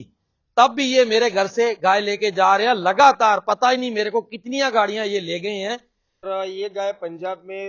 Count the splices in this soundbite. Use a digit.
1